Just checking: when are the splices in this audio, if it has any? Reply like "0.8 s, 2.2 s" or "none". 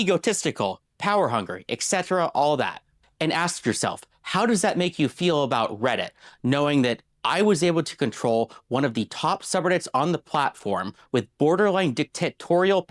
11.0 s